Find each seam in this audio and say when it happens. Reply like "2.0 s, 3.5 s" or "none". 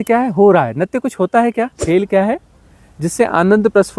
1.8 s